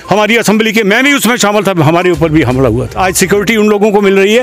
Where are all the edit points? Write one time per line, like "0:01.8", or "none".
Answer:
0:03.0